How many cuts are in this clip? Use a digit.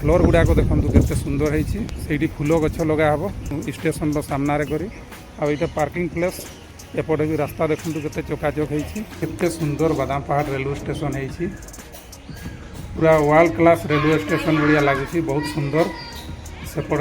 2